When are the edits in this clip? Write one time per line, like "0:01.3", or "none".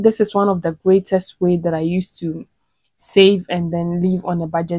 none